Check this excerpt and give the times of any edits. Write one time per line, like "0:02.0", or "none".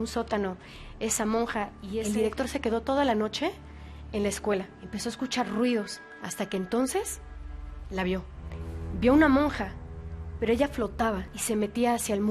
0:02.0
0:04.8
0:11.3